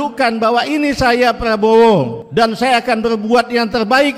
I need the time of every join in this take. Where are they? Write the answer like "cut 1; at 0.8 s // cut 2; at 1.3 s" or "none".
cut 1; at 2.2 s